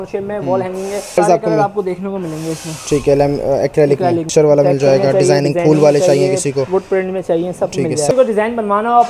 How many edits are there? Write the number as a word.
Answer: three